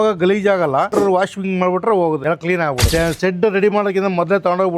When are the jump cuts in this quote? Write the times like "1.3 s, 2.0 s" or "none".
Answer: 0.9 s, 2.9 s